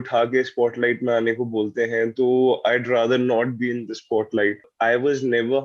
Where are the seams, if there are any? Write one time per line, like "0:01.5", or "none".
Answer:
0:04.7

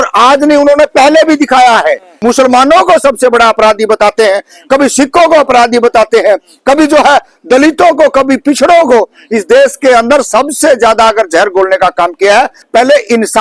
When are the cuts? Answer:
0:02.1

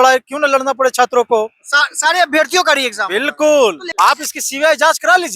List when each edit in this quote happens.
0:03.8

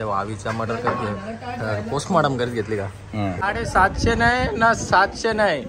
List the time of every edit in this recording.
0:03.4

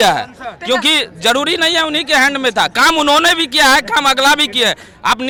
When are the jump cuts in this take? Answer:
none

